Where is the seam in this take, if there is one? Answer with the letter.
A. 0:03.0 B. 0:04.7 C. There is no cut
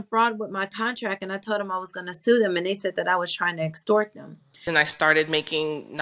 B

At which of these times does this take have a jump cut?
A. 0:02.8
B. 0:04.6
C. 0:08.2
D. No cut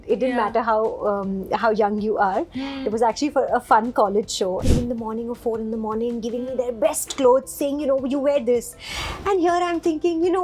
B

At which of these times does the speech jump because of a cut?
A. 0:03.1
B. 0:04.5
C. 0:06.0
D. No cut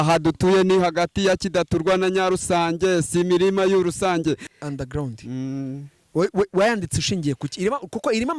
B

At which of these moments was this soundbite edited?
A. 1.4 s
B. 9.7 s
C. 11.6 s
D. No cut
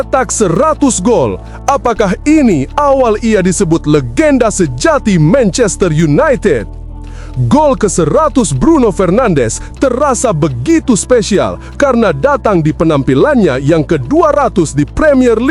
D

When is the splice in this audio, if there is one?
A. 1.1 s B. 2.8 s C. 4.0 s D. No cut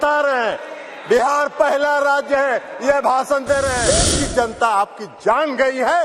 C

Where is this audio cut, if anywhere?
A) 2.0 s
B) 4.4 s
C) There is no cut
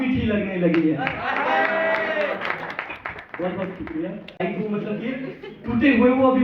B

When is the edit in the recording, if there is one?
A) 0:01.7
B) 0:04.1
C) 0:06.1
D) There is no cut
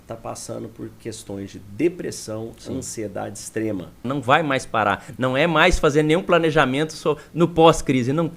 B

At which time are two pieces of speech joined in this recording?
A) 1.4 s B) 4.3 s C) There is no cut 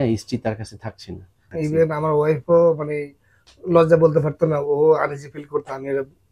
A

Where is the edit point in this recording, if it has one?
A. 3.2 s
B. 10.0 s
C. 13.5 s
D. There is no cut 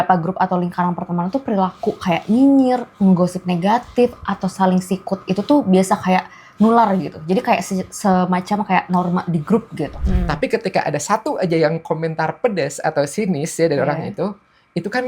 B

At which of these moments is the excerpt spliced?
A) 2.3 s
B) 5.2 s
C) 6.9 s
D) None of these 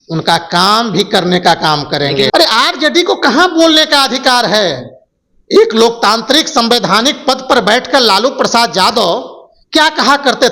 A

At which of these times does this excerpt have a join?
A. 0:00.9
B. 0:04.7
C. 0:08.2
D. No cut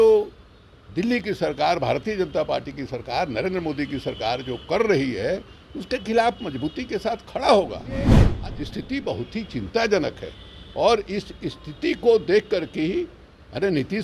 C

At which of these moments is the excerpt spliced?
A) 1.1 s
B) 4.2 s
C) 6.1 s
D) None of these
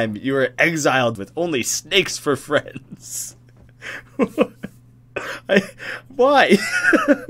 A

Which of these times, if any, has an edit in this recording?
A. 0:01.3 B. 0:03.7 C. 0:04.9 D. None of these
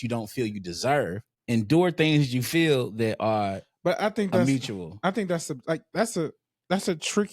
A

